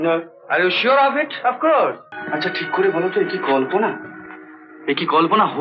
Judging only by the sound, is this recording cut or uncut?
cut